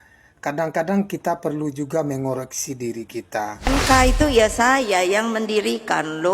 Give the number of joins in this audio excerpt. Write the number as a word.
one